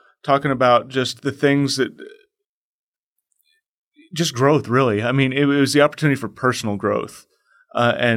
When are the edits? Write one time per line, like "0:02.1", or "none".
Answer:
none